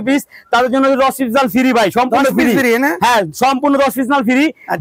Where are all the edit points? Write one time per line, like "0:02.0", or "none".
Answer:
none